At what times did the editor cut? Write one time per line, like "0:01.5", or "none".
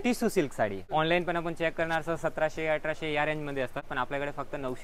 0:00.8
0:03.9